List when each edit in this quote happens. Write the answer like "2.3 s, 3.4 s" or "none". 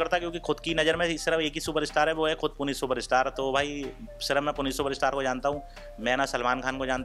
none